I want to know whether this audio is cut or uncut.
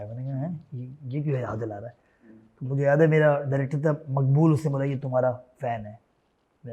uncut